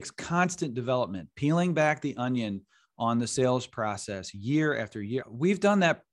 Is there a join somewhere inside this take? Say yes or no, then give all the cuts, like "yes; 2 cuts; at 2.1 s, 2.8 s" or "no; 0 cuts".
yes; 1 cut; at 5.2 s